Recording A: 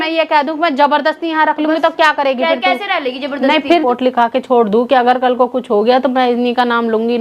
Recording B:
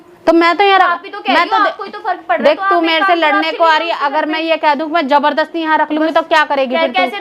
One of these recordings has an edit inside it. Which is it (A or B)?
A